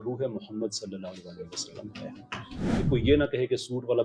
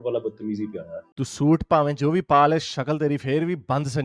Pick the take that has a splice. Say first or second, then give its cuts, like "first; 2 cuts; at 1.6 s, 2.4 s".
first; 1 cut; at 2.8 s